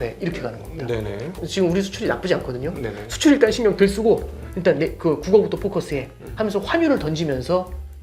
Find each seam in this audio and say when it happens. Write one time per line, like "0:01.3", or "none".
0:01.4